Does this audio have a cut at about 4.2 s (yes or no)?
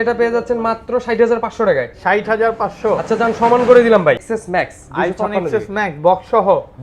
yes